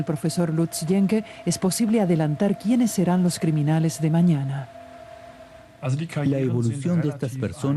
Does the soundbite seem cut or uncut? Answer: cut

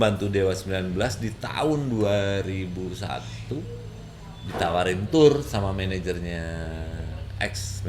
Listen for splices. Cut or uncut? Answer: uncut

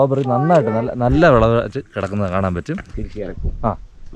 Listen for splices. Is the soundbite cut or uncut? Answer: cut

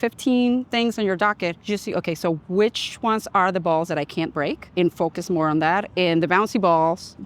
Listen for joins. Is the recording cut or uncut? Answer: cut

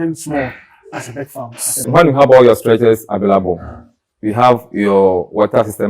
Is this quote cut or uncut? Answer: cut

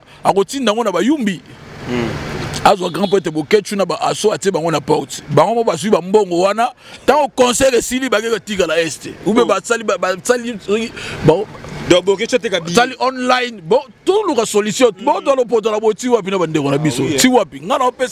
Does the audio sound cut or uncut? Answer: uncut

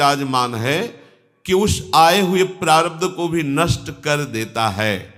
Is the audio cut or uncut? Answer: uncut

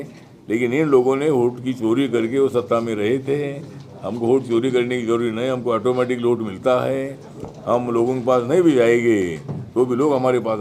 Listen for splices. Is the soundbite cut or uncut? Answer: uncut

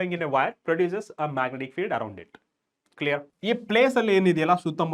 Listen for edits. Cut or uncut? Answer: cut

